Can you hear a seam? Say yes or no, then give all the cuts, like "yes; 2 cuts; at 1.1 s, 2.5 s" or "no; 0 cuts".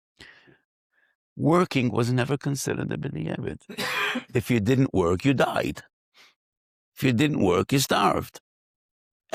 no; 0 cuts